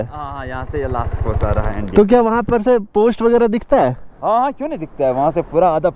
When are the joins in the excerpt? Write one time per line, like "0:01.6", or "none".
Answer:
none

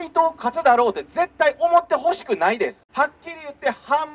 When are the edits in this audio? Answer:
0:02.8

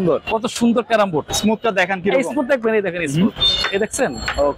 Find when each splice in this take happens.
0:01.3

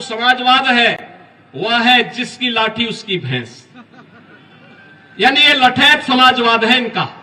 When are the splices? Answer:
none

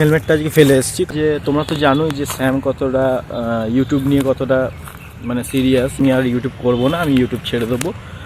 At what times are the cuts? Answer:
0:01.0
0:06.0

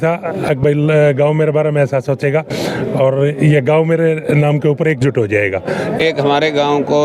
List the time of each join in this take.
0:06.0

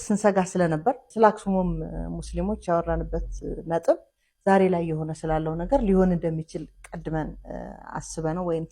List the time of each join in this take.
0:01.1

